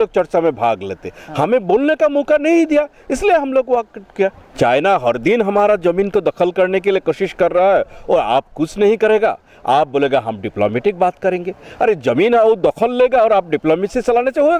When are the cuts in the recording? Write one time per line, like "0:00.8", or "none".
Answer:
0:04.4